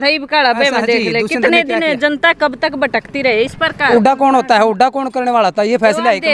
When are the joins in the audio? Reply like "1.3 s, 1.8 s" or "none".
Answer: 3.9 s